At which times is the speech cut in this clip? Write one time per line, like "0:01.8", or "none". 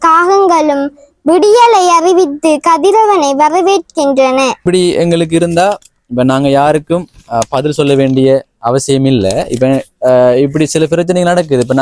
0:04.6